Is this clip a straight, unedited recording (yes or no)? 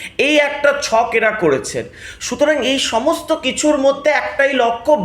yes